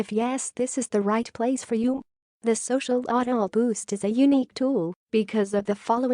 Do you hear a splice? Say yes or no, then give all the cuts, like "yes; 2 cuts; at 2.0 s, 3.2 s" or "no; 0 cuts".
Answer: no; 0 cuts